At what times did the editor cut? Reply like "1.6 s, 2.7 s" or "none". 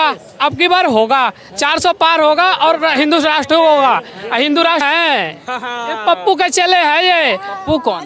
4.8 s